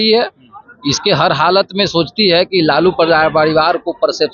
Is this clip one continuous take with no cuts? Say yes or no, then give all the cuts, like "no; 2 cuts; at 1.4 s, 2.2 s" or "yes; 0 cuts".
yes; 0 cuts